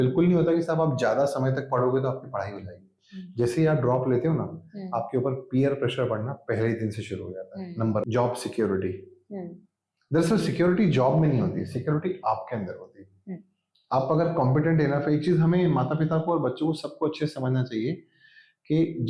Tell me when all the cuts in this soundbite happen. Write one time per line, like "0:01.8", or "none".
0:08.1